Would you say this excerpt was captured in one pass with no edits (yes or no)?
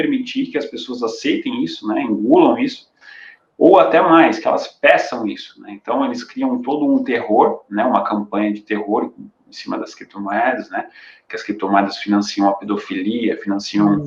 yes